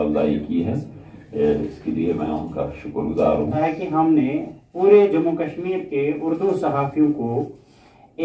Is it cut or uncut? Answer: cut